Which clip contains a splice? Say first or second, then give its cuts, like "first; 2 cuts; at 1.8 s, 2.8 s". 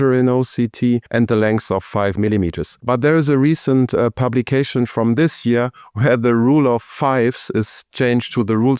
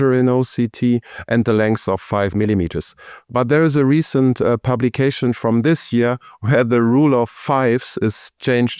first; 2 cuts; at 1.1 s, 2.7 s